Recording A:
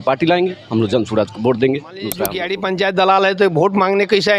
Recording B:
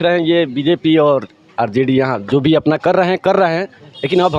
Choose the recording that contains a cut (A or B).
A